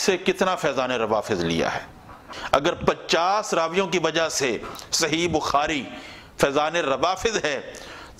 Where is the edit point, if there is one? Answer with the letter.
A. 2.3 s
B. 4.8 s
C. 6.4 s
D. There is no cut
A